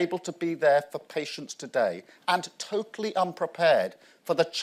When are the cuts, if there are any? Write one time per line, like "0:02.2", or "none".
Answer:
none